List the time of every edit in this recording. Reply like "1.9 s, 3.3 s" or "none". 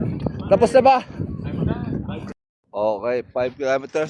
2.3 s